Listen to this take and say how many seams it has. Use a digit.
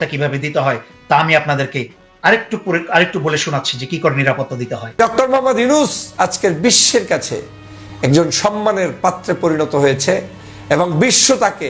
1